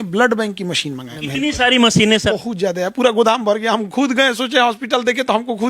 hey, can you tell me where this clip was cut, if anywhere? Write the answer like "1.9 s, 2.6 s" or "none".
1.1 s, 2.3 s